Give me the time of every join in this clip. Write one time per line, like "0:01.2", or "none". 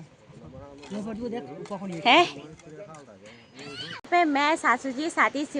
0:04.1